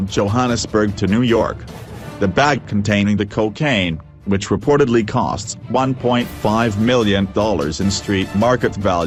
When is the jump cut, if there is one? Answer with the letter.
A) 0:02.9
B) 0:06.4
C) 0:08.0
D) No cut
D